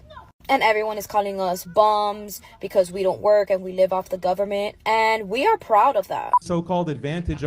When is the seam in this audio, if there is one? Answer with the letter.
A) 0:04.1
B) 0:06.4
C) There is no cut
B